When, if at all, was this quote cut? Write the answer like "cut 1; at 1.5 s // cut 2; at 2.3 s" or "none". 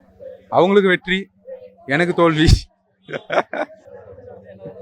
none